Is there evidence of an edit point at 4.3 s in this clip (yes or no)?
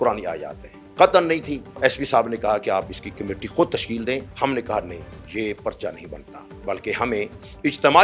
yes